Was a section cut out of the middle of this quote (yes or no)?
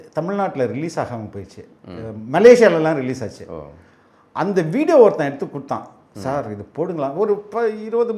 no